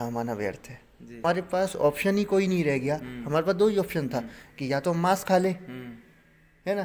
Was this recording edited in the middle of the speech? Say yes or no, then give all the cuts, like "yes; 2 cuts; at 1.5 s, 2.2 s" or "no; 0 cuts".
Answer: yes; 1 cut; at 1.2 s